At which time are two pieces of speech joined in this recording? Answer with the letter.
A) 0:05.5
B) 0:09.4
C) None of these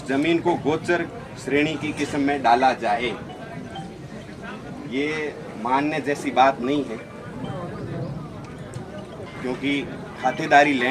C